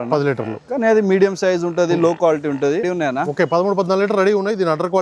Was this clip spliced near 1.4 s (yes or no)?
no